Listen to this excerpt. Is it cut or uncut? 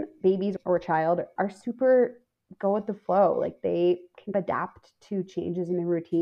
uncut